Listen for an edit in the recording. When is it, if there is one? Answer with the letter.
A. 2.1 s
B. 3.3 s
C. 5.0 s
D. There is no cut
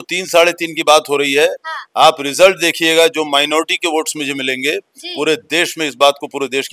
D